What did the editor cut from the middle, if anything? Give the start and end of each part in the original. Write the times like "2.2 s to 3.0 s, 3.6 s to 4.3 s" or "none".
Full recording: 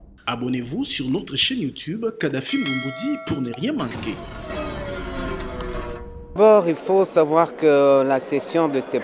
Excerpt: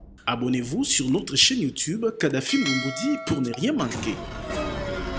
none